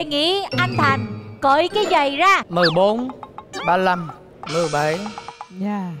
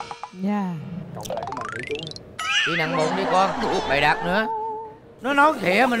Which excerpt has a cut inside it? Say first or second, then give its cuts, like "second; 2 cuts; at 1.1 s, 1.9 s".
first; 1 cut; at 2.5 s